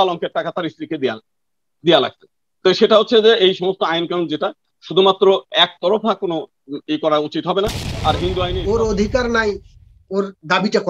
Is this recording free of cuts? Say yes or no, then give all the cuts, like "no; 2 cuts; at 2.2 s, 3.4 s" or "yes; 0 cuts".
no; 1 cut; at 8.5 s